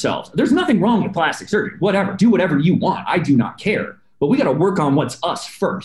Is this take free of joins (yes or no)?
yes